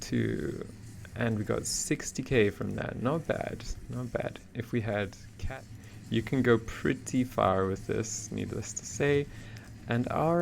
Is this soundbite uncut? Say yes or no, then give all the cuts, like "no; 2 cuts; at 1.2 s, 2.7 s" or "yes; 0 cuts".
no; 1 cut; at 5.3 s